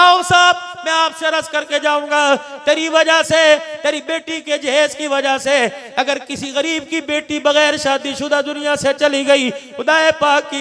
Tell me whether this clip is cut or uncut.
uncut